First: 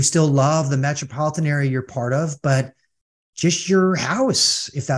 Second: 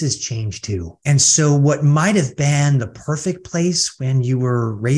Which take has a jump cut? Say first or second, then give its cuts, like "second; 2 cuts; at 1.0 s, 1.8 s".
second; 1 cut; at 0.9 s